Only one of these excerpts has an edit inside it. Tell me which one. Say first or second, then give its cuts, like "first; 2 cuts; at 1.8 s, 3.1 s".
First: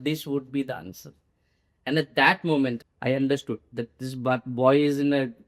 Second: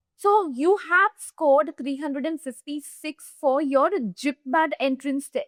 first; 1 cut; at 2.8 s